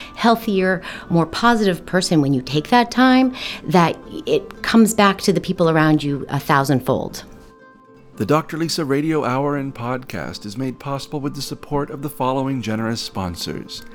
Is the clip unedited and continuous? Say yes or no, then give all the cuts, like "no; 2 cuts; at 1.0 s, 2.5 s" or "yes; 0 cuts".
no; 1 cut; at 8.0 s